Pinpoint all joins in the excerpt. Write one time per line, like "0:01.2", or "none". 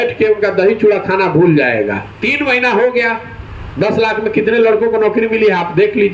0:02.1